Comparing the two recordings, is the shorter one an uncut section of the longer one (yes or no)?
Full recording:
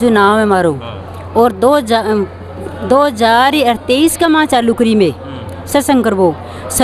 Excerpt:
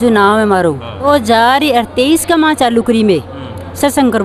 no